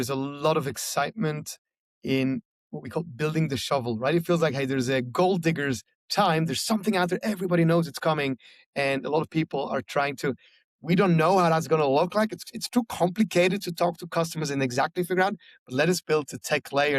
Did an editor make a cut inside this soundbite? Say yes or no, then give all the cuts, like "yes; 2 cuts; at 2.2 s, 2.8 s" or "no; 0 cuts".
no; 0 cuts